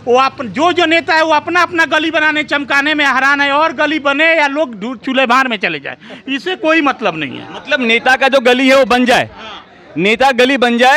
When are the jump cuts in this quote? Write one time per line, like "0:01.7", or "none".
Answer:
none